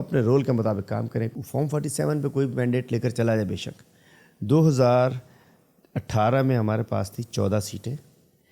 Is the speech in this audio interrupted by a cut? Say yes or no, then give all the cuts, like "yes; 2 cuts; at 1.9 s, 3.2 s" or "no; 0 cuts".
yes; 1 cut; at 1.3 s